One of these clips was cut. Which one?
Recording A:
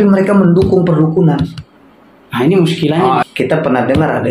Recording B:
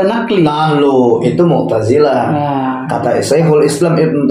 A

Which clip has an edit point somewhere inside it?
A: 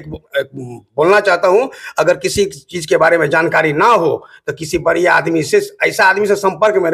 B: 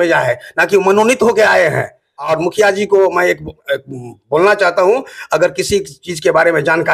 B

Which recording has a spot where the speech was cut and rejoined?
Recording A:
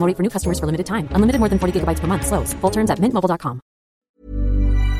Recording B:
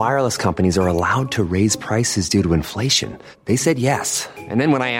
A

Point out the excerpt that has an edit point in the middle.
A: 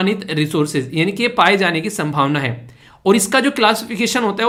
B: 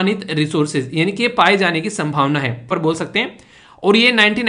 B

